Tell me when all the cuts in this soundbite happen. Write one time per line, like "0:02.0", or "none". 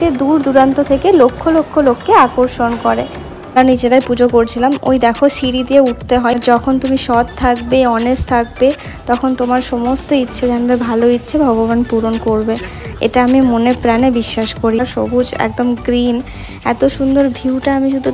0:03.6
0:06.3
0:14.8